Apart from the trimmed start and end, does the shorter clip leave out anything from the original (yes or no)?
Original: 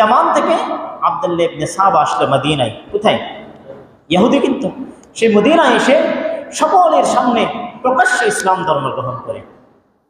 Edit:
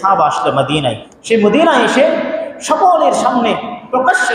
yes